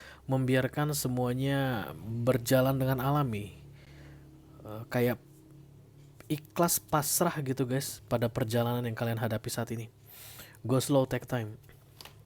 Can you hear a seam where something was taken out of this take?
no; 0 cuts

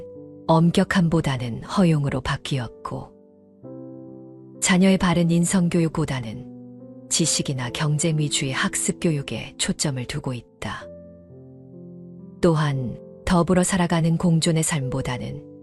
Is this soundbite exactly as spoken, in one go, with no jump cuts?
yes; 0 cuts

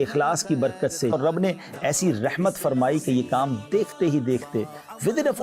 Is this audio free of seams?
no; 1 cut; at 1.1 s

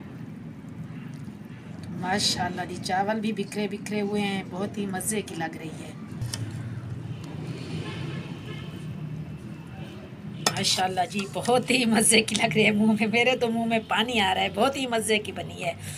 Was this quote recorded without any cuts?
yes; 0 cuts

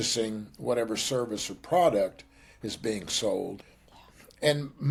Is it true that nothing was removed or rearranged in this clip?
yes; 0 cuts

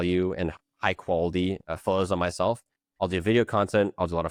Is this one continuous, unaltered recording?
yes; 0 cuts

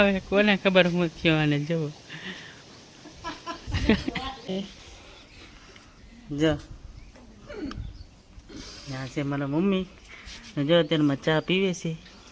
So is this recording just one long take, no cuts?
no; 1 cut; at 4.5 s

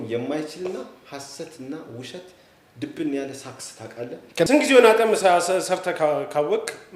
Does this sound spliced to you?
yes; 1 cut; at 4.5 s

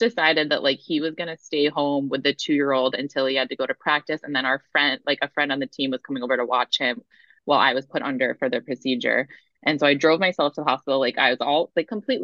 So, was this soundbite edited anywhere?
no; 0 cuts

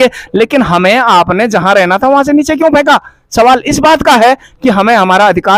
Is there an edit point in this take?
no; 0 cuts

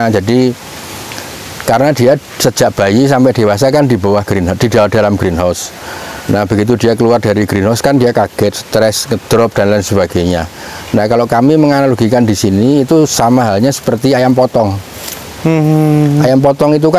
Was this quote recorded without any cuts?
yes; 0 cuts

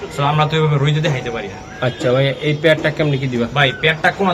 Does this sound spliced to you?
no; 0 cuts

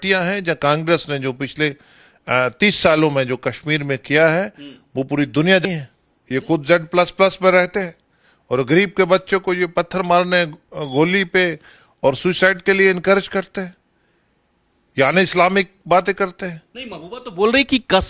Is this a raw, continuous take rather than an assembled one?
no; 1 cut; at 5.6 s

